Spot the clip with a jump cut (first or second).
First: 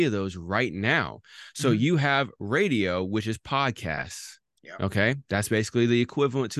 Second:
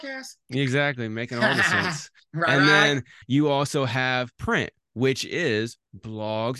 second